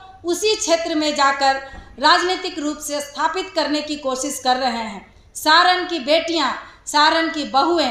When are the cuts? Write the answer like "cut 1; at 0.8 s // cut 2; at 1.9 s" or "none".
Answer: none